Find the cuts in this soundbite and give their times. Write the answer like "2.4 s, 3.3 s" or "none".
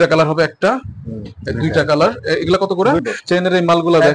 3.0 s